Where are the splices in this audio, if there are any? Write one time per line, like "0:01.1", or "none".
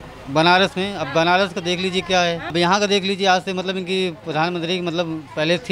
0:02.5